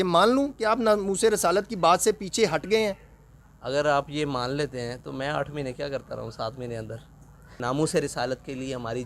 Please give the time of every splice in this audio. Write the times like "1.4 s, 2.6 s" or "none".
7.5 s